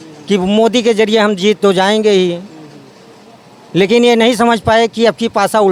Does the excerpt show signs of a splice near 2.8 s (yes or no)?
no